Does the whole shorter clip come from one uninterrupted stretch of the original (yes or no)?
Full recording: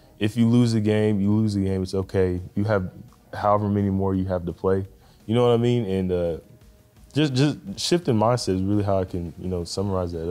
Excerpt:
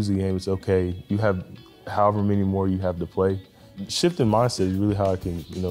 no